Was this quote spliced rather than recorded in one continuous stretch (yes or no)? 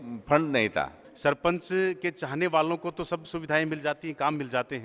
yes